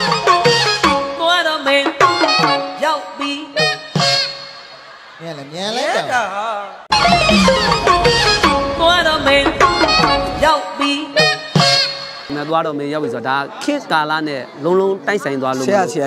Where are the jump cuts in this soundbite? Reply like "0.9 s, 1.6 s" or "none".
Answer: 6.8 s, 12.3 s